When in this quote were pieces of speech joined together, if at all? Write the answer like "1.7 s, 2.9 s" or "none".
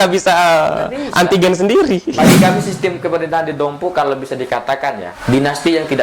2.1 s, 5.1 s